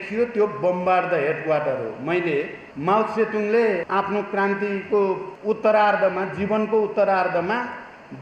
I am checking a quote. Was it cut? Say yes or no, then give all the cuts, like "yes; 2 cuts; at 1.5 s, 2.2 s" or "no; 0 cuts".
yes; 3 cuts; at 2.6 s, 3.8 s, 5.3 s